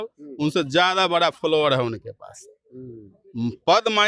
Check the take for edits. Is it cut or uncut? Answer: uncut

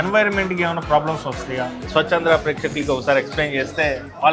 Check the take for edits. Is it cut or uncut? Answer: cut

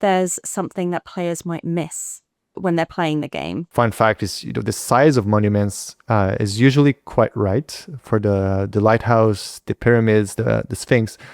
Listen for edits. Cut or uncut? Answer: cut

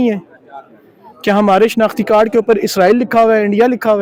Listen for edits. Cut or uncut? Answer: uncut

